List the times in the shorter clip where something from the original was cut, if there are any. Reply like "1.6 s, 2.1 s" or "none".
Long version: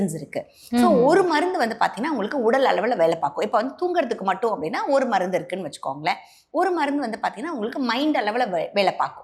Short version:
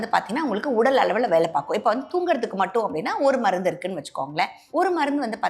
4.6 s